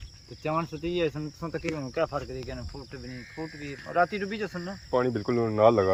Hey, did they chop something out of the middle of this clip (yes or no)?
no